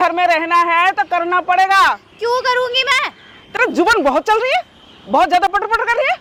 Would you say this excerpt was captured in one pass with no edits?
yes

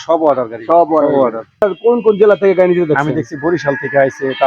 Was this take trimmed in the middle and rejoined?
yes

